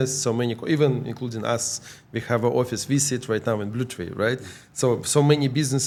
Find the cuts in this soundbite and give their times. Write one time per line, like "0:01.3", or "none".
none